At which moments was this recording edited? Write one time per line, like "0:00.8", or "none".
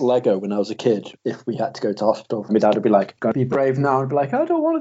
0:01.1
0:02.5
0:03.1